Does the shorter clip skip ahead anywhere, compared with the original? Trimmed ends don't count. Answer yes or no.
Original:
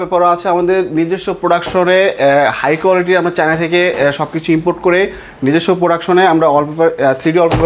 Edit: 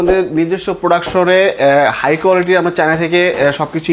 no